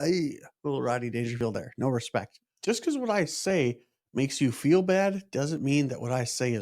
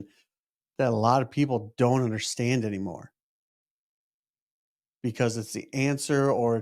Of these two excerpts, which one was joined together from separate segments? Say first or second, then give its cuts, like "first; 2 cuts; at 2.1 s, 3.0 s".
first; 1 cut; at 2.4 s